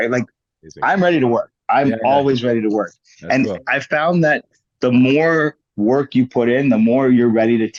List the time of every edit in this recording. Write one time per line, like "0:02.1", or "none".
none